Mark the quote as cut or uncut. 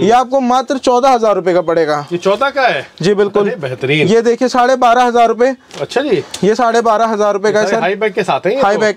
uncut